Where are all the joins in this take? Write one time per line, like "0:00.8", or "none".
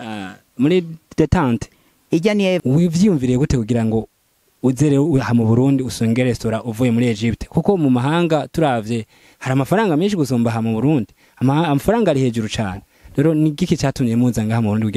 0:02.6